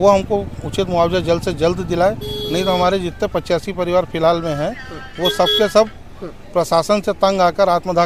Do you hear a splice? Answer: no; 0 cuts

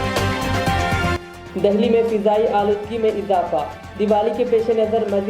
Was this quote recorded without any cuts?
yes; 0 cuts

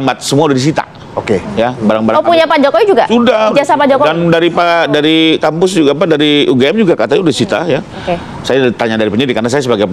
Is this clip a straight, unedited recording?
yes; 0 cuts

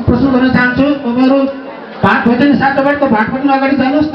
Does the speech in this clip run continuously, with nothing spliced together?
yes; 0 cuts

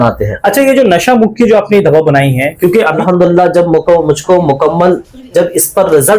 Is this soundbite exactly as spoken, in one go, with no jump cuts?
no; 1 cut; at 3.0 s

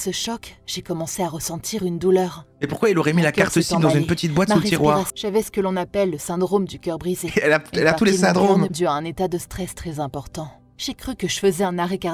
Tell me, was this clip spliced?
yes; 2 cuts; at 5.1 s, 8.7 s

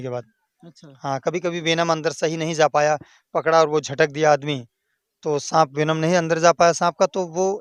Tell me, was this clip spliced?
no; 0 cuts

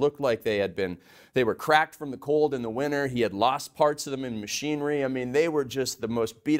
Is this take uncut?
yes; 0 cuts

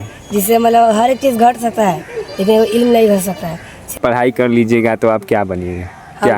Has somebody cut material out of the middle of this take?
yes; 1 cut; at 3.9 s

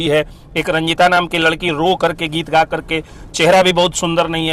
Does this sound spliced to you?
no; 0 cuts

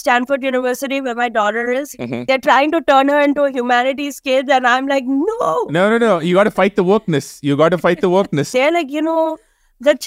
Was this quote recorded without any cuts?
no; 2 cuts; at 2.2 s, 8.5 s

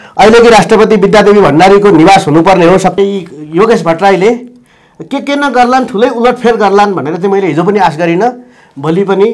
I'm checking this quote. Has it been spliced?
yes; 1 cut; at 3.0 s

